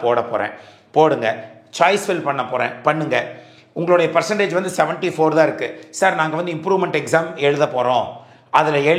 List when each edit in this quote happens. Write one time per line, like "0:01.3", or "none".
none